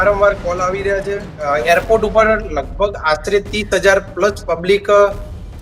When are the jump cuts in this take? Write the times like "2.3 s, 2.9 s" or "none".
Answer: 1.5 s